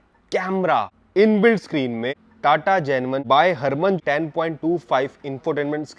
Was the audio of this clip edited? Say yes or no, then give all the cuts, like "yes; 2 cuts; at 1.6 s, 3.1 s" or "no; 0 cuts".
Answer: yes; 4 cuts; at 1.0 s, 2.2 s, 3.2 s, 4.0 s